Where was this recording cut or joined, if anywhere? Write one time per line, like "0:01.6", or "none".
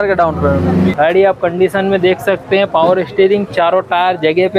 0:00.9